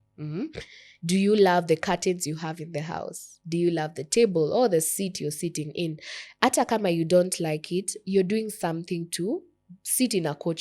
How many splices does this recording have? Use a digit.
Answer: 0